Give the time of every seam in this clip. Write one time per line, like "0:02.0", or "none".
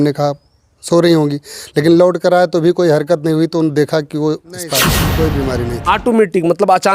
0:05.0